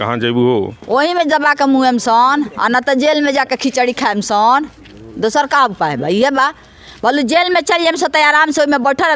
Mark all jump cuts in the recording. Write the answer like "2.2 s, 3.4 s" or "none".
none